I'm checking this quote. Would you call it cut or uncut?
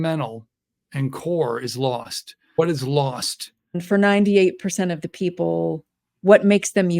cut